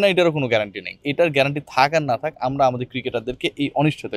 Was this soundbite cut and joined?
yes; 1 cut; at 1.0 s

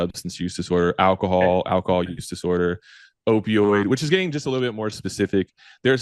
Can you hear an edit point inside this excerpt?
no; 0 cuts

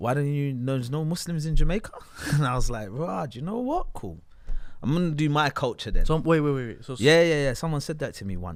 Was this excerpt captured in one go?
yes; 0 cuts

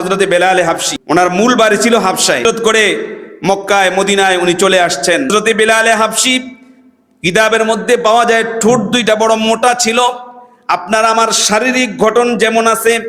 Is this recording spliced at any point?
yes; 3 cuts; at 0.9 s, 2.4 s, 5.3 s

